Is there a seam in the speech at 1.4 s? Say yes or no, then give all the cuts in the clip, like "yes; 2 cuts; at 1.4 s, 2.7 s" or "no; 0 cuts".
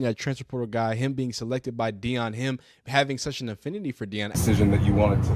no; 1 cut; at 4.4 s